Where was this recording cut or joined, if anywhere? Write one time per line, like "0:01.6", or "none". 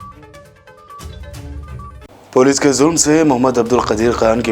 0:02.1